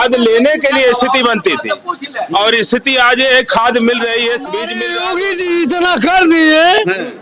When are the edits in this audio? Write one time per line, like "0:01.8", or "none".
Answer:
0:04.8